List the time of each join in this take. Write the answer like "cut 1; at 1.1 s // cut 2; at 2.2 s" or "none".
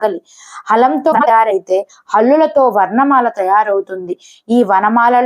cut 1; at 1.2 s